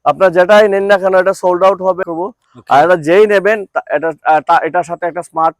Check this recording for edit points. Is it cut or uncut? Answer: cut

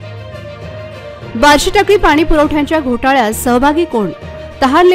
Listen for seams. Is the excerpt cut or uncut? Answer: uncut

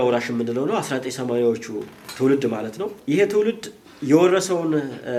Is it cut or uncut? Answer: uncut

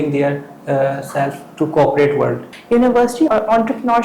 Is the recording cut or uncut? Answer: cut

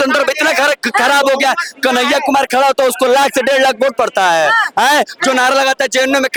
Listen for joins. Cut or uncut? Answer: uncut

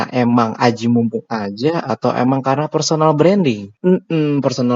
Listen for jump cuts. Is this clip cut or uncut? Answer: cut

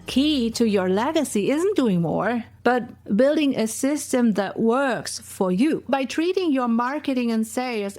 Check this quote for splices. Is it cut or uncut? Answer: cut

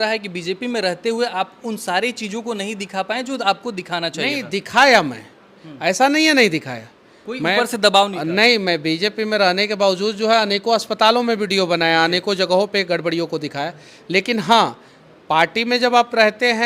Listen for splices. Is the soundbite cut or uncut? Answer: uncut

